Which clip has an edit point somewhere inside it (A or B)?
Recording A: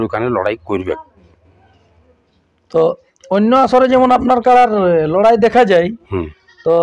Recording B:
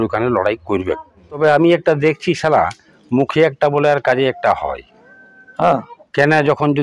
B